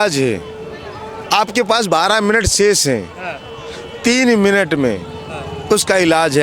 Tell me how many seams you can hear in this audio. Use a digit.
0